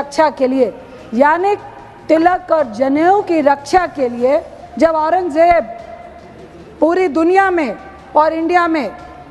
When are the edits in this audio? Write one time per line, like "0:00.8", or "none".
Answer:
0:04.6